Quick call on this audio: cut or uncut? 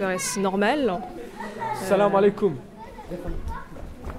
uncut